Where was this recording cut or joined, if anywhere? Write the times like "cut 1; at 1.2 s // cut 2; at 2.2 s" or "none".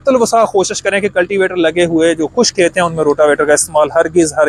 none